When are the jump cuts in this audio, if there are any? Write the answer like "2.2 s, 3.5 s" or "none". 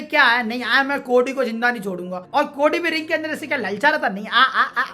none